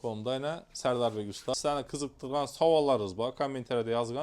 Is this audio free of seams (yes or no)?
no